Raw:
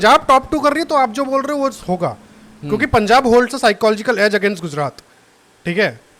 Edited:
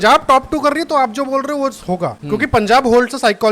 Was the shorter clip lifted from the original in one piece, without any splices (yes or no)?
no